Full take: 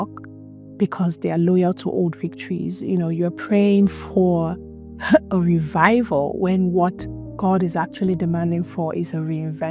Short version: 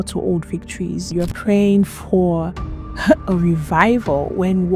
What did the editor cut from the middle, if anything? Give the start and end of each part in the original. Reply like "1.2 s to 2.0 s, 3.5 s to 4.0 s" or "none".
2.8 s to 3.1 s